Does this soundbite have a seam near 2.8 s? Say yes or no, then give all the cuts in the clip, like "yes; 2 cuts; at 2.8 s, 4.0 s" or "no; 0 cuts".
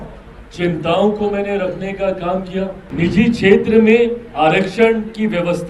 yes; 1 cut; at 2.8 s